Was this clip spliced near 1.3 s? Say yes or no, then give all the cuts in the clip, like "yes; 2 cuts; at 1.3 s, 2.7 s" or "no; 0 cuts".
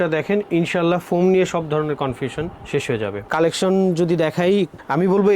no; 1 cut; at 3.2 s